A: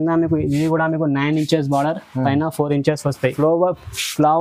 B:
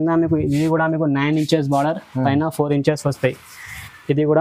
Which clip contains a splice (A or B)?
A